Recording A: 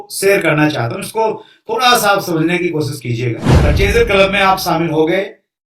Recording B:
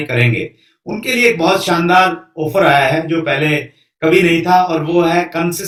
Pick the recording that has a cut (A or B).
A